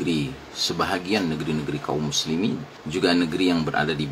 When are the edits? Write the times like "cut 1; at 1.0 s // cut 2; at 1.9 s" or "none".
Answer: cut 1; at 2.7 s